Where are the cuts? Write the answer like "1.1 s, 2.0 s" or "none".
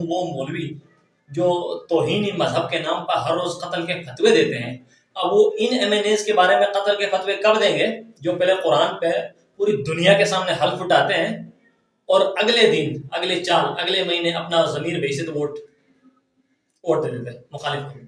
none